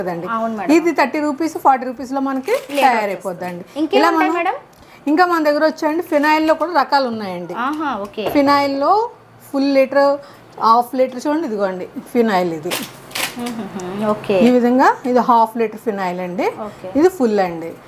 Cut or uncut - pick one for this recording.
uncut